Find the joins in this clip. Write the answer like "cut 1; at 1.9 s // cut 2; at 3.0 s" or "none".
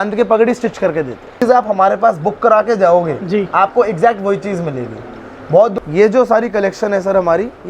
cut 1; at 1.3 s // cut 2; at 5.7 s